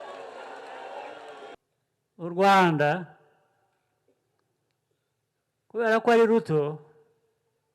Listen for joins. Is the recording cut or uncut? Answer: cut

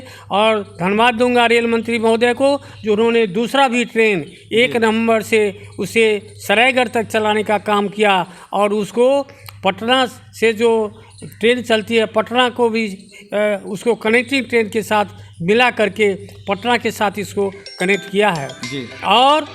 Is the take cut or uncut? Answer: uncut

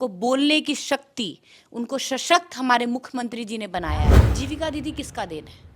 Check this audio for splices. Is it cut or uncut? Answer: cut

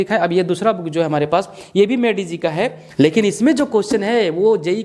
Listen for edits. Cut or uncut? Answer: cut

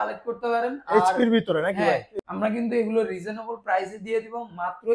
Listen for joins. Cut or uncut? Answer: cut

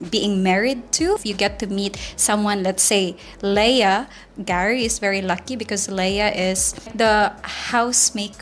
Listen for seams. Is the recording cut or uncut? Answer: cut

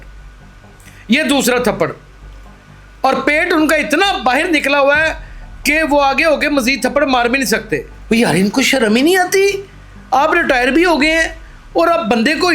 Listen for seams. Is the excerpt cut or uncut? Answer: cut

